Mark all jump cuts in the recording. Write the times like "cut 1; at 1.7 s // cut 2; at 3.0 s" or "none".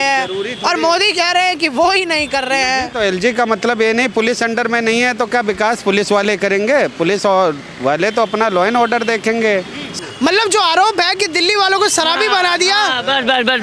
cut 1; at 10.0 s

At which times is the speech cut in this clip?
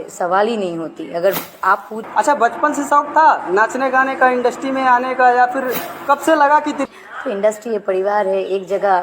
cut 1; at 2.0 s // cut 2; at 6.8 s

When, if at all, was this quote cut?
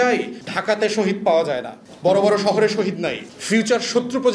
cut 1; at 3.2 s

